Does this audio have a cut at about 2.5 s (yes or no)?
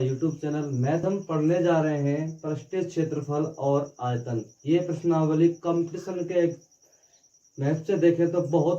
no